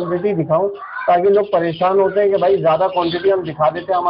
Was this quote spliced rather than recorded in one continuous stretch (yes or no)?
no